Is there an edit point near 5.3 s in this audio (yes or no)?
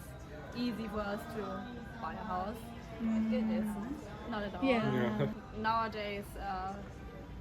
yes